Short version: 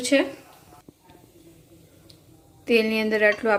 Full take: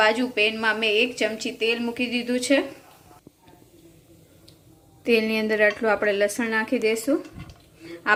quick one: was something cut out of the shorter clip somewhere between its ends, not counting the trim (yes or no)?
no